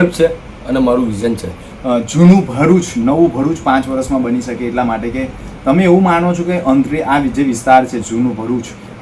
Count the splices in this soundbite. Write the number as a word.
zero